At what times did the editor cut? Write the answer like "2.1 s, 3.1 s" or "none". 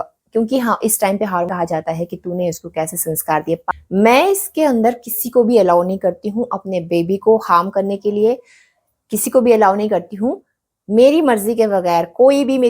1.5 s, 3.6 s